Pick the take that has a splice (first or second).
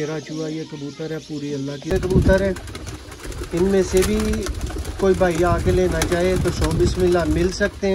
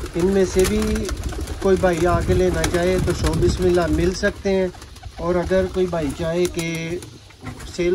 first